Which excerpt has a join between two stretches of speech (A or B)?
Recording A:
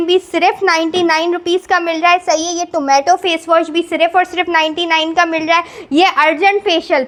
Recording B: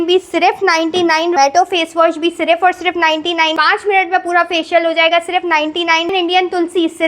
B